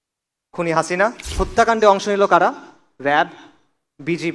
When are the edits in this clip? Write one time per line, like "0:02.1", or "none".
0:01.3